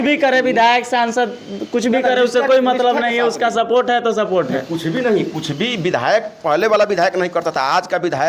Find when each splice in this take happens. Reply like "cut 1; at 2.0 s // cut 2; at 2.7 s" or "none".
none